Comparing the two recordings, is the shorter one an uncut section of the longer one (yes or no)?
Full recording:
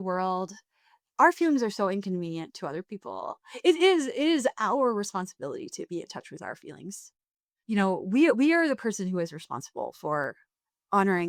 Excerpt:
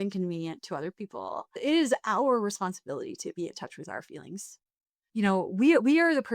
no